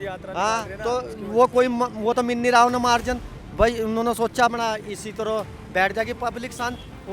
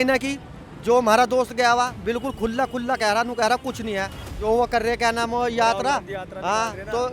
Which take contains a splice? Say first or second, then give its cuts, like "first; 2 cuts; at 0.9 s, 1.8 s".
second; 1 cut; at 4.2 s